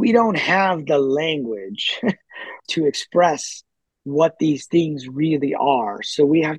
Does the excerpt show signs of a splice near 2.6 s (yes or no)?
yes